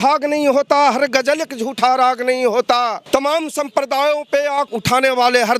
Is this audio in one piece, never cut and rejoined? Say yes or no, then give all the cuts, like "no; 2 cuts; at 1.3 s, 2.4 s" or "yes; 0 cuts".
no; 2 cuts; at 3.0 s, 4.7 s